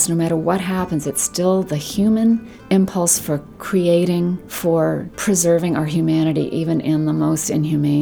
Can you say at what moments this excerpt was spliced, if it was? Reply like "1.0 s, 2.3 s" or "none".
2.5 s, 4.5 s, 5.1 s